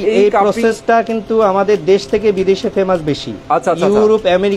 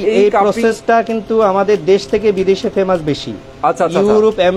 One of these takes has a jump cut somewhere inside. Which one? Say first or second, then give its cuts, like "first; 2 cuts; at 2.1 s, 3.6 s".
first; 1 cut; at 3.3 s